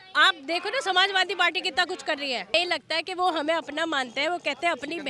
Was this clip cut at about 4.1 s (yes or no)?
no